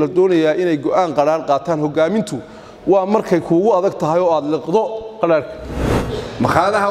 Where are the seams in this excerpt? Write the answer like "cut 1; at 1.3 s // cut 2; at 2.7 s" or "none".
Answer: cut 1; at 5.7 s